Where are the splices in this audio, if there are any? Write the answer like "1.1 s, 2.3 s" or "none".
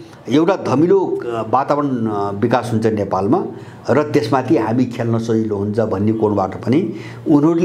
none

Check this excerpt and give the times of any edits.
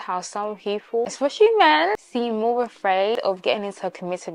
none

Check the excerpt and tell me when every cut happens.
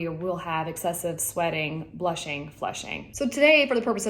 3.1 s

